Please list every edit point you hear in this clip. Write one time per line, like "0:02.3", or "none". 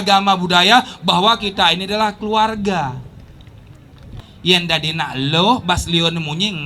0:04.2